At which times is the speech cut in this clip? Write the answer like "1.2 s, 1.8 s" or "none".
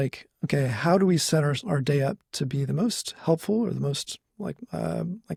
none